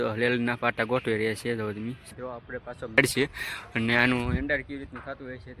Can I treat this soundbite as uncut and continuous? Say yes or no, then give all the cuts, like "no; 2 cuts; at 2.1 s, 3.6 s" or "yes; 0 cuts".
no; 1 cut; at 3.0 s